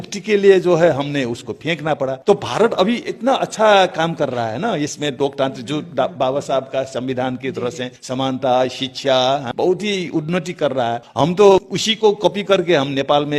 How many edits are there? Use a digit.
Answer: 5